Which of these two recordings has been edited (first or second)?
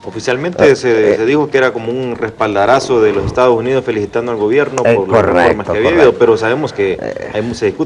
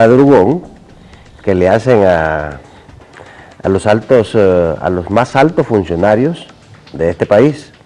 second